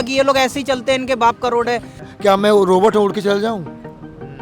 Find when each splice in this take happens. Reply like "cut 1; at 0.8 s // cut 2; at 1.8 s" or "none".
cut 1; at 2.1 s